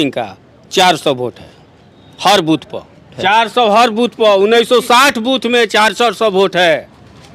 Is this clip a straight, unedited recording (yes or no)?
yes